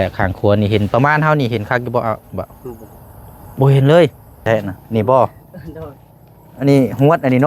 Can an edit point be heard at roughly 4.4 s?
yes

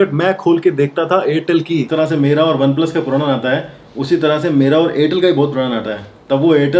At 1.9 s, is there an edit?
yes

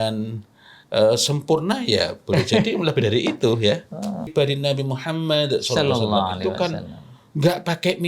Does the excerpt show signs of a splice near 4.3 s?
yes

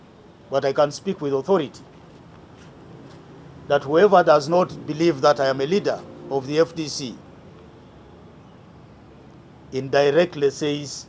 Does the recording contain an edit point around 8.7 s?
no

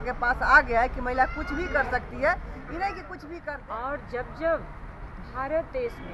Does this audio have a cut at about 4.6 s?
no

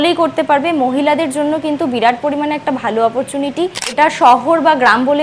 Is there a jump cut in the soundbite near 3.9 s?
yes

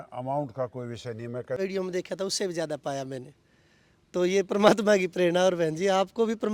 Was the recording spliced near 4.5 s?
no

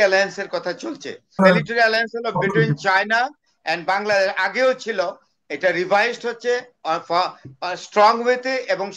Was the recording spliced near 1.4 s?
yes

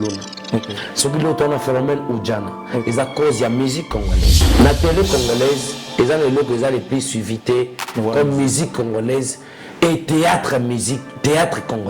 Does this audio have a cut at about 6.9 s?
no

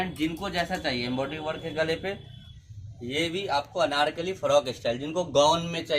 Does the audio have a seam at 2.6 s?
yes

